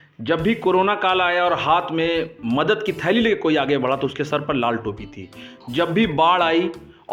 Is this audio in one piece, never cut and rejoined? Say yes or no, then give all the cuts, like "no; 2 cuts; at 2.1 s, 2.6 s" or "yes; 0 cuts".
yes; 0 cuts